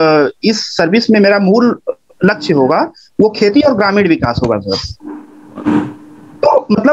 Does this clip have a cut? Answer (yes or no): no